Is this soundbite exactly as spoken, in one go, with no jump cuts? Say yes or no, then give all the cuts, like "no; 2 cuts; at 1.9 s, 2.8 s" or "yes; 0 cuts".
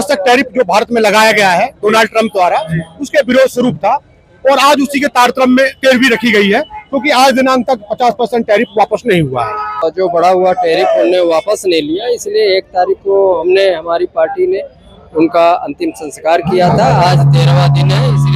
no; 1 cut; at 9.8 s